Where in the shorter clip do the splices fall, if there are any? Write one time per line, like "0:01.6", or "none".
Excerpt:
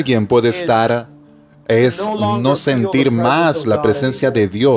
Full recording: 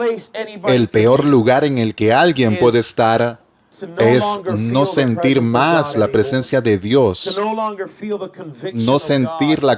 none